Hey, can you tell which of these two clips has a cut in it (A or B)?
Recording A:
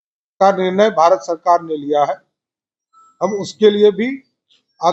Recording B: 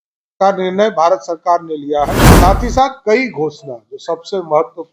B